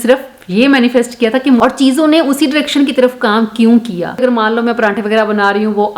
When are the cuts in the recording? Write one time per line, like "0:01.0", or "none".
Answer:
0:01.6
0:04.1